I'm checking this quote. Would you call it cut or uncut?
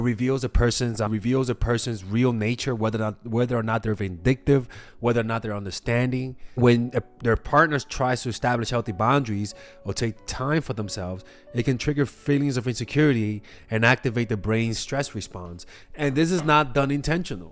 cut